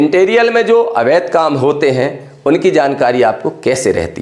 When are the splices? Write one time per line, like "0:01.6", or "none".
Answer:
none